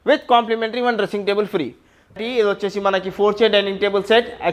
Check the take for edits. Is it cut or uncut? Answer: cut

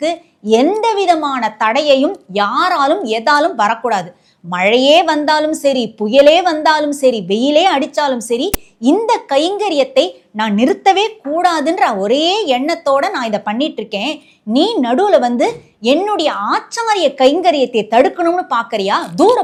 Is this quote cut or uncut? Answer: uncut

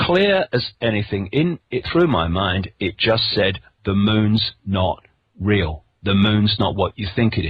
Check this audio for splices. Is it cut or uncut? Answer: cut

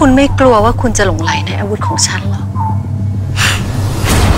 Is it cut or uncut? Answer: uncut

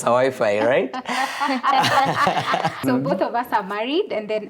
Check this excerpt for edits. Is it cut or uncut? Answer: cut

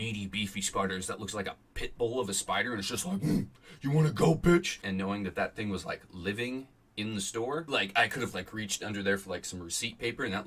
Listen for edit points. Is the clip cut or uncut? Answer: cut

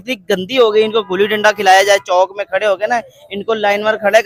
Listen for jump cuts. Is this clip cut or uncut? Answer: uncut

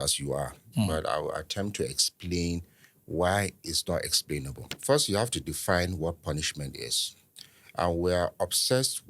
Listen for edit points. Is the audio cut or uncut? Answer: cut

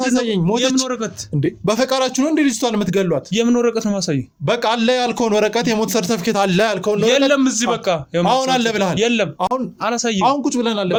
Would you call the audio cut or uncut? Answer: uncut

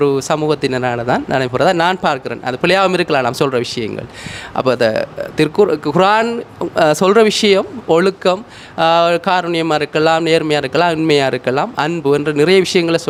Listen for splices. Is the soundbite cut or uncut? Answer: uncut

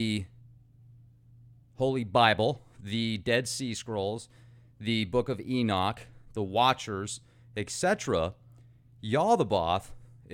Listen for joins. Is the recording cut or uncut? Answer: cut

